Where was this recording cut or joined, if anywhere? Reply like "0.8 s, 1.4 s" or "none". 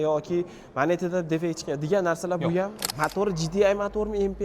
2.8 s